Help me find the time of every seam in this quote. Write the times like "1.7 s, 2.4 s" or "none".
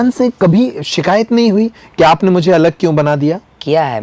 none